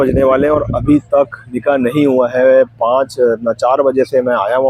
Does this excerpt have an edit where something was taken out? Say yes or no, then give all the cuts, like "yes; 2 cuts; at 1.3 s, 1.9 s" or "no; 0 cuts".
no; 0 cuts